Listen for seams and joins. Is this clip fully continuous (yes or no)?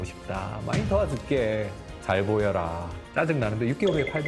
no